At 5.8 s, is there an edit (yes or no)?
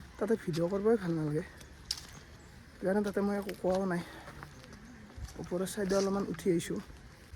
no